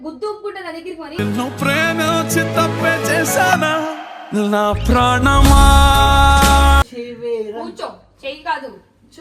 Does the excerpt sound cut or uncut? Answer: cut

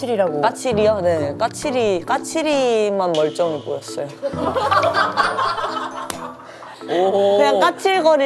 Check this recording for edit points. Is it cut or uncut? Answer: cut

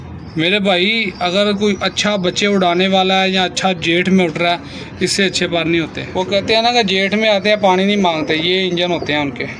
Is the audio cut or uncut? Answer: cut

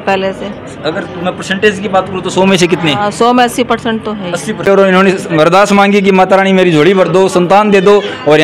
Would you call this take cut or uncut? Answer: cut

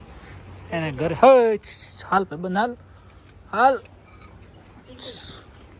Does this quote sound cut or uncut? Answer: uncut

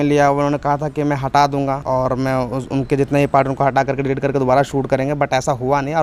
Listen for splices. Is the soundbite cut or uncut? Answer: uncut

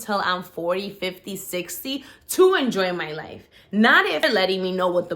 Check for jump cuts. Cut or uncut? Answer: cut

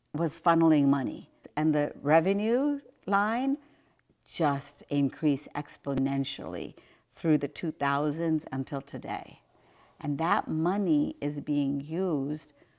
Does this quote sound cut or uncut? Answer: cut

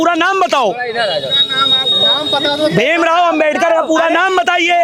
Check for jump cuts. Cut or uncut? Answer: uncut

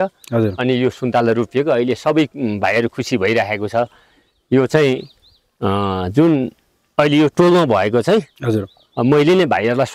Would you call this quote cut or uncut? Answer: uncut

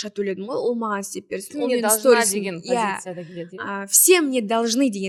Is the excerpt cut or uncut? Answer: uncut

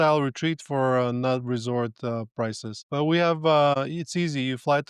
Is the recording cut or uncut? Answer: cut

